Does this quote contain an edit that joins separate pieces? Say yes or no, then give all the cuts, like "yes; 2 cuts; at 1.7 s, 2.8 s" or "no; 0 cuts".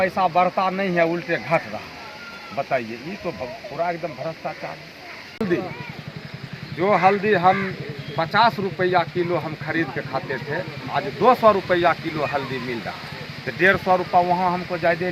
yes; 1 cut; at 5.4 s